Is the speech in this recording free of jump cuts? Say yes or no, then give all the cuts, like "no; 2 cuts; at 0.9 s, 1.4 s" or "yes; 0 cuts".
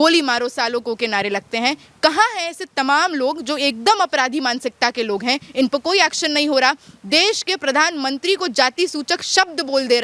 yes; 0 cuts